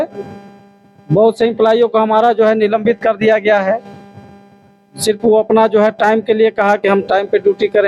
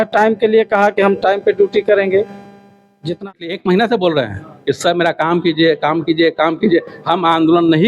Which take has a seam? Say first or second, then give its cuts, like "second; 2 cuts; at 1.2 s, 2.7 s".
second; 1 cut; at 3.2 s